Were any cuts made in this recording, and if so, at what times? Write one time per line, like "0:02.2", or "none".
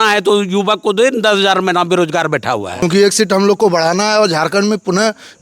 0:02.8